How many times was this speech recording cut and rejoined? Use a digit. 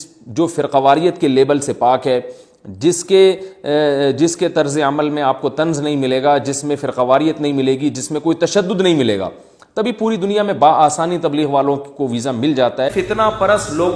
1